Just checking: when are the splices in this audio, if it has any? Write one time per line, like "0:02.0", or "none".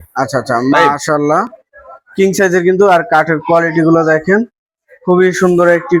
none